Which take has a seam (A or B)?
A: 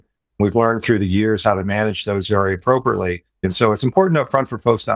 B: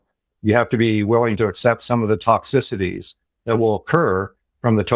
A